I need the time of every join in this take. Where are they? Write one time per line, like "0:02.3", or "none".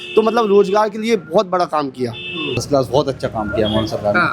0:02.6